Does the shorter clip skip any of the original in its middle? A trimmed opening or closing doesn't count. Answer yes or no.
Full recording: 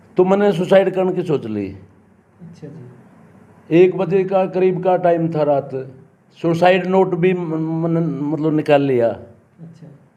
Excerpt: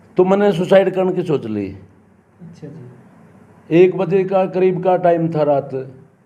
no